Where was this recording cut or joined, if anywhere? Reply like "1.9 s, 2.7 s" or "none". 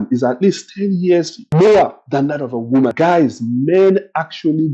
1.4 s, 2.9 s